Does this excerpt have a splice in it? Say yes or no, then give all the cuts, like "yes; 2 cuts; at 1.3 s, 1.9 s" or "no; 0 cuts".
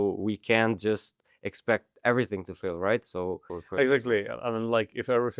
yes; 1 cut; at 3.5 s